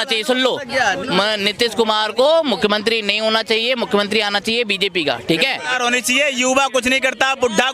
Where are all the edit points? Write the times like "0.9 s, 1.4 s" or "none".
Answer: 5.7 s